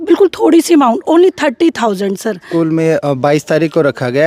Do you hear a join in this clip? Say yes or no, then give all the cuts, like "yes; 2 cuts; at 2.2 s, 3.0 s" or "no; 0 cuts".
yes; 1 cut; at 2.4 s